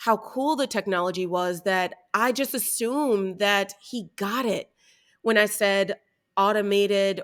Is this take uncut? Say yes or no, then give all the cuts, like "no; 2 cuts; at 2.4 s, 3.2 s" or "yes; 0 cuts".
yes; 0 cuts